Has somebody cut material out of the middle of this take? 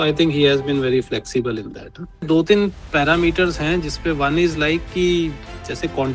yes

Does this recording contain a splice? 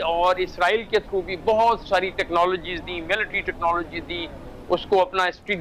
no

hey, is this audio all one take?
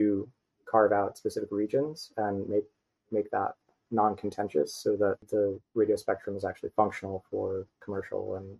no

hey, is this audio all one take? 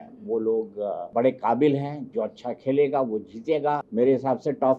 no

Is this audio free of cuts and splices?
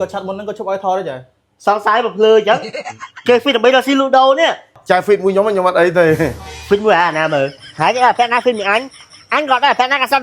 no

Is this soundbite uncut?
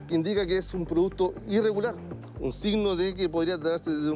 no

